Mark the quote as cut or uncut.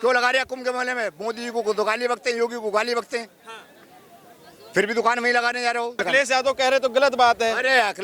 cut